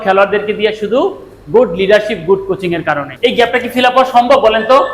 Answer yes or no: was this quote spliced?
yes